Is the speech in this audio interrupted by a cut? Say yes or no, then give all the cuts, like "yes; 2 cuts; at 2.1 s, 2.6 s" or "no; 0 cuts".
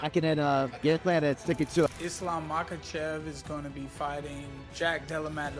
yes; 1 cut; at 2.0 s